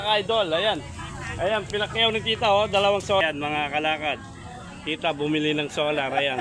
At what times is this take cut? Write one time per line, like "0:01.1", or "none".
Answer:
0:03.2